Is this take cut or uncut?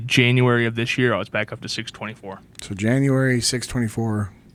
uncut